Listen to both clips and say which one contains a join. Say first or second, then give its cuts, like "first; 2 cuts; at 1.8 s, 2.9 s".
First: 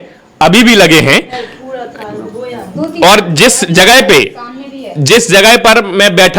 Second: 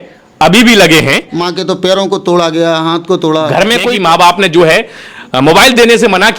second; 2 cuts; at 1.3 s, 3.8 s